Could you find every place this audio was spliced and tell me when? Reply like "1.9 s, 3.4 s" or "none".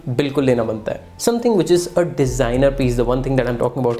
1.1 s